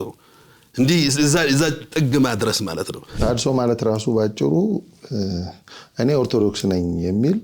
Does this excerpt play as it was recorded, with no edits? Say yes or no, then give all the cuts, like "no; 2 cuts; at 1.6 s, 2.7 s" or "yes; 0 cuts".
no; 1 cut; at 3.2 s